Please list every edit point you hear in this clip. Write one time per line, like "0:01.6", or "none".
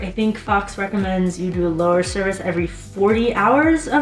none